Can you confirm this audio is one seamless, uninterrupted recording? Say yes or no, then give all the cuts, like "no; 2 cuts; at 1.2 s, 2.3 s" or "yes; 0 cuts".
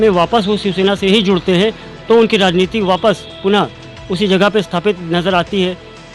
no; 1 cut; at 1.8 s